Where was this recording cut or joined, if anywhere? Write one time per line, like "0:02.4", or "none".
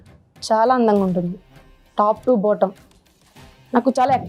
none